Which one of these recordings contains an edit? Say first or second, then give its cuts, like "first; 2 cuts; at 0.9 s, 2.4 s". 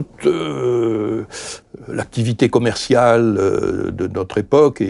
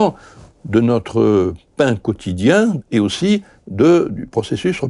second; 1 cut; at 2.8 s